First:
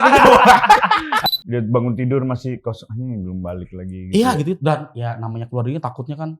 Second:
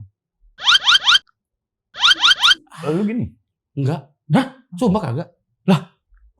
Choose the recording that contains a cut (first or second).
first